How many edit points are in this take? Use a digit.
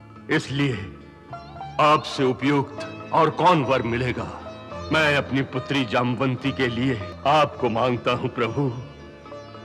1